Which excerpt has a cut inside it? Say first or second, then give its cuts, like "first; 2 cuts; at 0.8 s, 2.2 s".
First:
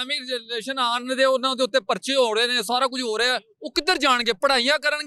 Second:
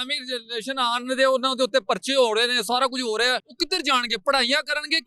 second; 1 cut; at 3.5 s